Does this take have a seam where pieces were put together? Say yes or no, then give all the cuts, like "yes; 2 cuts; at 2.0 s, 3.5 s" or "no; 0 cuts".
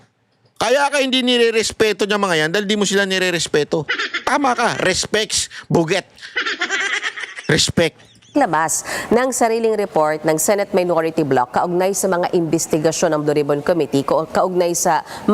no; 0 cuts